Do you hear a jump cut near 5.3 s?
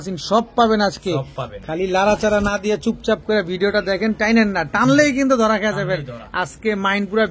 no; 0 cuts

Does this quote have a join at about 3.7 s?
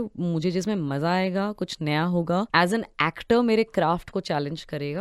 no; 1 cut; at 2.5 s

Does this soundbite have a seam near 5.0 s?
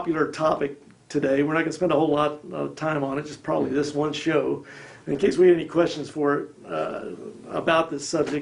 yes; 1 cut; at 5.0 s

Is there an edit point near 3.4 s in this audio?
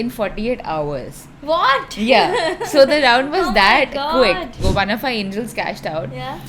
no; 1 cut; at 4.6 s

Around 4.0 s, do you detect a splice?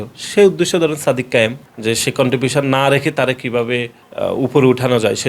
no; 1 cut; at 1.7 s

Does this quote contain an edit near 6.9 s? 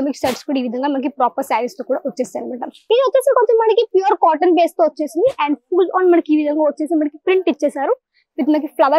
no; 1 cut; at 2.7 s

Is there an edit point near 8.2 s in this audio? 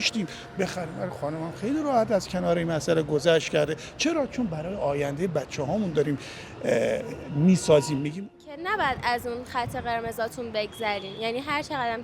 yes; 1 cut; at 8.2 s

